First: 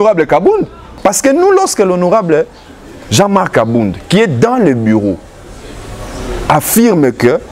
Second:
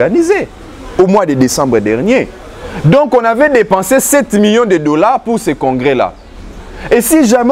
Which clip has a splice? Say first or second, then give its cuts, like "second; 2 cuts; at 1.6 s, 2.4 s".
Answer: first; 1 cut; at 1.0 s